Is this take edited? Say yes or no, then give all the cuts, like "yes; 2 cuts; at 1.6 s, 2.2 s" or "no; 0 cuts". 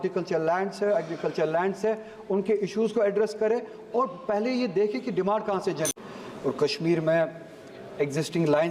yes; 1 cut; at 6.0 s